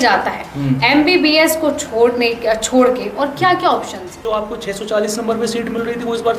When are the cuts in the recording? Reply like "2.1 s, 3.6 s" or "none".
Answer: 4.2 s

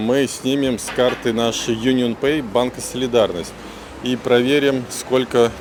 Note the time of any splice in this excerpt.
none

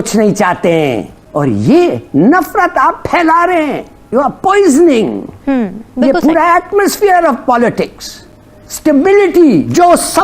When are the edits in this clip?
1.2 s, 3.9 s

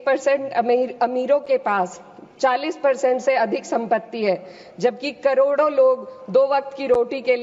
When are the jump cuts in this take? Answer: none

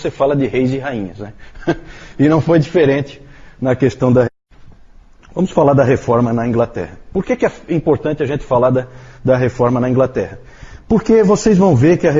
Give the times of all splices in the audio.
none

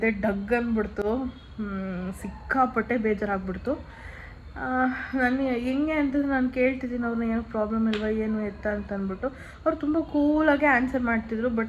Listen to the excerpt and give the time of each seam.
none

